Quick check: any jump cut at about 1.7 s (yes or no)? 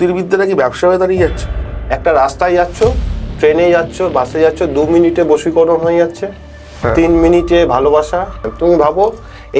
yes